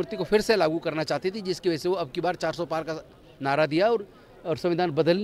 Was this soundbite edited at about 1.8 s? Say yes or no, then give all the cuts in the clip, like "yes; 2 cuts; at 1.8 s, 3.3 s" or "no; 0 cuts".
no; 0 cuts